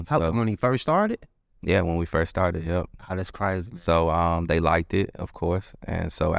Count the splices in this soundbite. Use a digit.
0